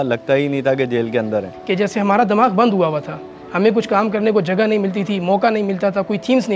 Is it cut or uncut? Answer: uncut